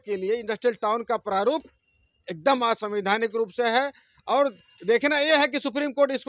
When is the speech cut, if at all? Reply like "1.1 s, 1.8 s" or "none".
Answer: none